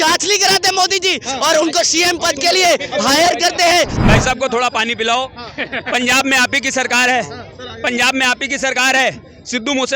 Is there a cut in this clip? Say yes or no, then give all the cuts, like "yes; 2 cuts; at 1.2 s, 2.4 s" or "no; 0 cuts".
yes; 1 cut; at 4.0 s